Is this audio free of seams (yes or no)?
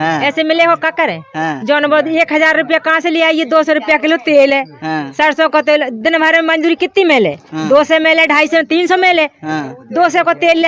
yes